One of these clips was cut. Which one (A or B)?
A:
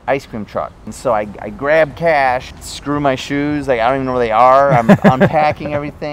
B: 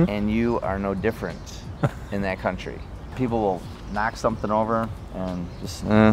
A